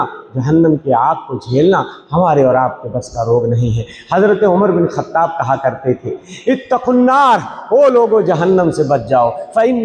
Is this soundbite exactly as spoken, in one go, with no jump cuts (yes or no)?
yes